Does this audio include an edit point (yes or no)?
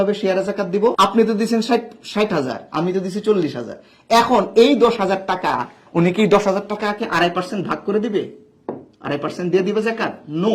yes